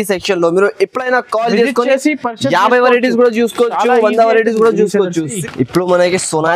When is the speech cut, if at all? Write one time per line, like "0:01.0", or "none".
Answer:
0:05.4